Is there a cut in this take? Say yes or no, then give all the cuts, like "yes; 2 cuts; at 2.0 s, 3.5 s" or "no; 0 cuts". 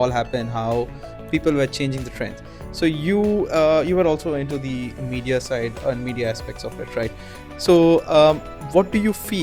no; 0 cuts